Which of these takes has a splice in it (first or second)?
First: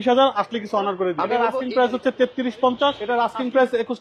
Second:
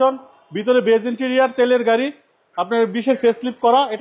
first